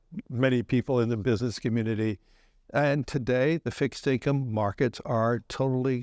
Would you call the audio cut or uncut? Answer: uncut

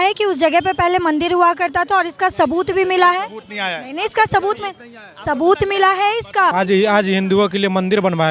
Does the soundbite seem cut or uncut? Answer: cut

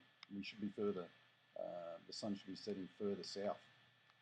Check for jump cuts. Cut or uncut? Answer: uncut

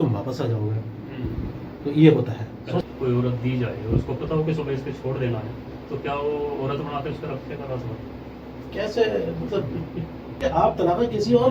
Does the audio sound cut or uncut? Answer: cut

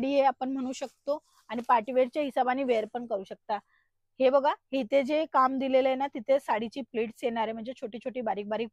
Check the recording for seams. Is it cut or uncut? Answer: uncut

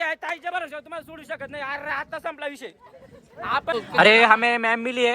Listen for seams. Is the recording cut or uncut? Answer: cut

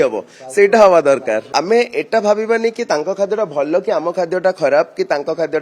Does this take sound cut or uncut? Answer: cut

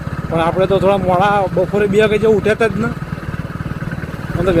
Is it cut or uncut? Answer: uncut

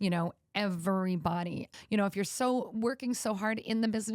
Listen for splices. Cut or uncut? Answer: cut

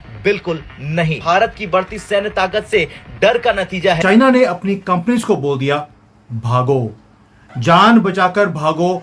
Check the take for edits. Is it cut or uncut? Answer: cut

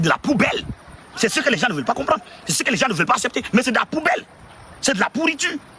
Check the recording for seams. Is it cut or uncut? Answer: uncut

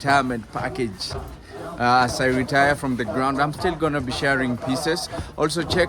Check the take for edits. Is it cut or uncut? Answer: uncut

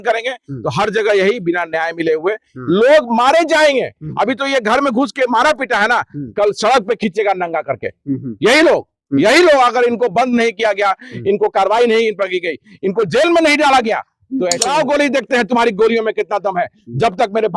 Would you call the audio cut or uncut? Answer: cut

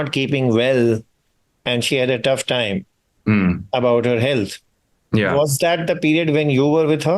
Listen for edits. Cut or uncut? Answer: uncut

